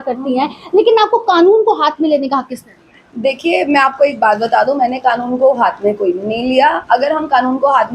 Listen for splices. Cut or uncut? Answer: uncut